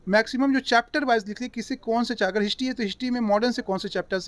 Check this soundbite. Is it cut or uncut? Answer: uncut